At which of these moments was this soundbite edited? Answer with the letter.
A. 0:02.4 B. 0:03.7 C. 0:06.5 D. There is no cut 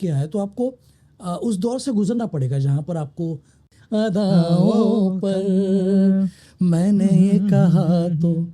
B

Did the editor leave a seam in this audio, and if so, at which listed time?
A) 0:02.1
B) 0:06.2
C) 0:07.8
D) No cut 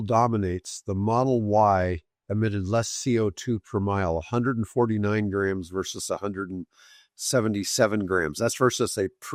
D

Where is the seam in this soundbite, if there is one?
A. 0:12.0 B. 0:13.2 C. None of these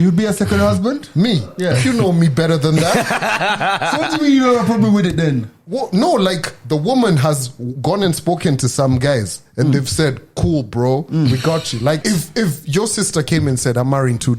A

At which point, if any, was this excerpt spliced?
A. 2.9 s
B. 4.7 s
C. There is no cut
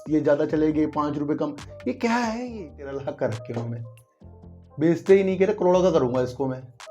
A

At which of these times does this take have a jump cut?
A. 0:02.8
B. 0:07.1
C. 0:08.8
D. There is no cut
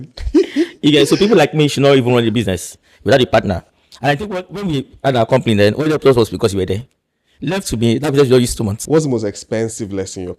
C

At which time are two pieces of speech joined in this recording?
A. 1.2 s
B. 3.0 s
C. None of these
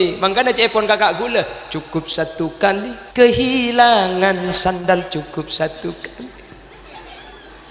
B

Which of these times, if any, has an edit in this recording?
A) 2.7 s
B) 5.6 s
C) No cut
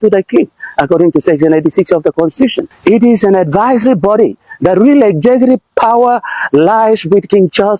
A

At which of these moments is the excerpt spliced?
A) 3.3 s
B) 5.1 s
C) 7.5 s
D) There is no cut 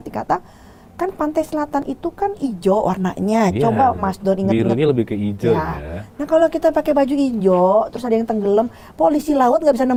D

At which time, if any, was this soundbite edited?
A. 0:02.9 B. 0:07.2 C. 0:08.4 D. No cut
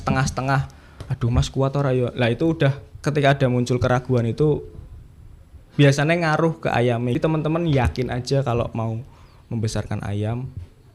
B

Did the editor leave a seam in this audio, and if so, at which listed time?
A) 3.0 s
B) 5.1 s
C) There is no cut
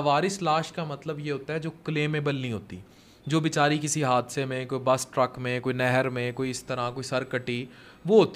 C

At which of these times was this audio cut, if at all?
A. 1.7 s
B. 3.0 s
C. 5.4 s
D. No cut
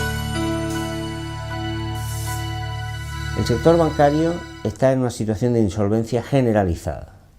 B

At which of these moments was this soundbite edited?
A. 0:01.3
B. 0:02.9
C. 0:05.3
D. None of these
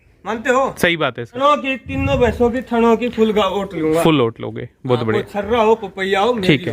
A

